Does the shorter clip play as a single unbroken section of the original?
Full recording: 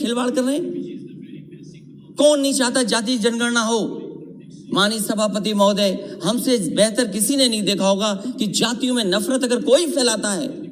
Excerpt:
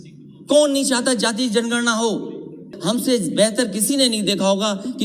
no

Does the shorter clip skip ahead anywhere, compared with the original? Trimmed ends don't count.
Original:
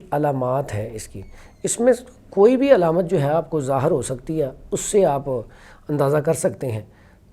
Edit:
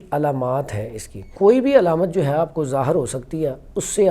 yes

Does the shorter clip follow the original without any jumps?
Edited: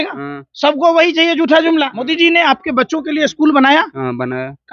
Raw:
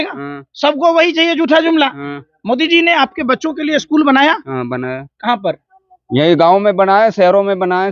no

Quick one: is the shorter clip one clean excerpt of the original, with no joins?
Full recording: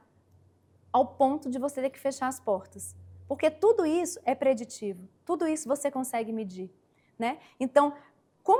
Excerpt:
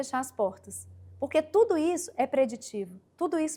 yes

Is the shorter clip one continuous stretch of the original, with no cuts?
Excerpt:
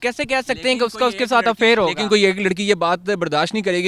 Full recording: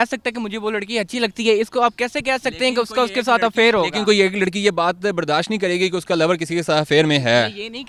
yes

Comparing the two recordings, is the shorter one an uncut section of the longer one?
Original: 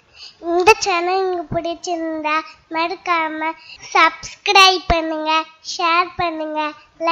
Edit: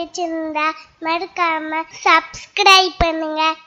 no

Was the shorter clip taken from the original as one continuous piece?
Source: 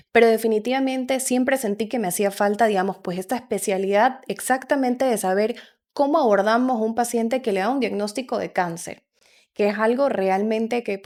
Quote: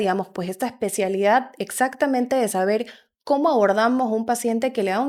yes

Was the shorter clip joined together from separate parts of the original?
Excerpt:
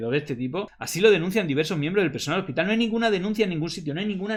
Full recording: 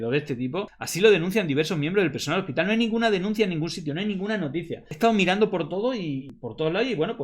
no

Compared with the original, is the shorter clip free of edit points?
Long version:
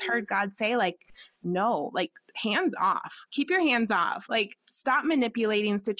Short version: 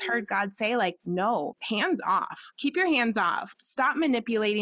no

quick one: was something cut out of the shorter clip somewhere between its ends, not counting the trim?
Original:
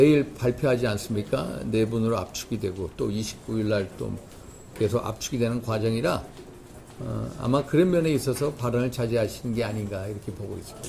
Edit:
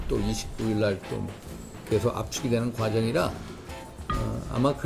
no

